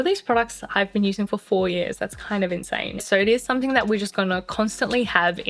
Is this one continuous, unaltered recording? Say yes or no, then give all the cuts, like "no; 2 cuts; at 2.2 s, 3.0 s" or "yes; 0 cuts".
no; 1 cut; at 3.0 s